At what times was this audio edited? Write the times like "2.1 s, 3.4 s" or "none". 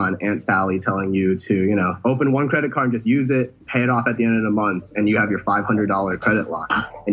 2.0 s, 4.9 s